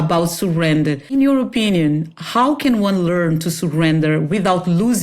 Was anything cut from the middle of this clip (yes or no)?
yes